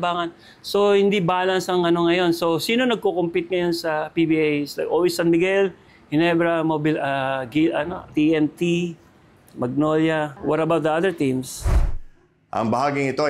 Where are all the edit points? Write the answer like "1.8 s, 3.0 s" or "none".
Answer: 11.7 s